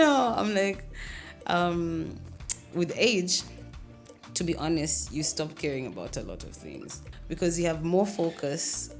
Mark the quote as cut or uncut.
cut